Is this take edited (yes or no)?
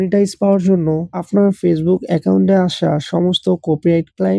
yes